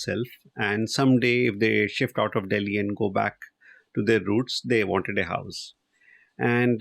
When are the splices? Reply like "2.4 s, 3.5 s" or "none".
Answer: none